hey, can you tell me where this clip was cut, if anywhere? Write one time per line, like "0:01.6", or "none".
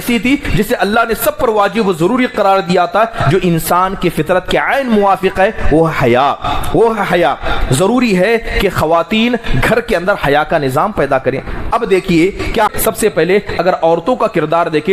0:12.7